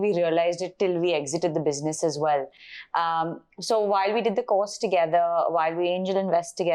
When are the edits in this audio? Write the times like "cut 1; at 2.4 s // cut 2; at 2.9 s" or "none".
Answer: none